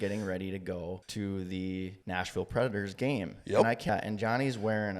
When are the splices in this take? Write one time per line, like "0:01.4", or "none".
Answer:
0:01.1
0:02.0
0:03.9